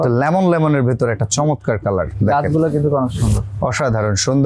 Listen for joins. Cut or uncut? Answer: uncut